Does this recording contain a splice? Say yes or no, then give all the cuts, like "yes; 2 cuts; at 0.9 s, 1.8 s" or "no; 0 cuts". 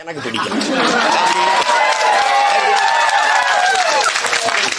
no; 0 cuts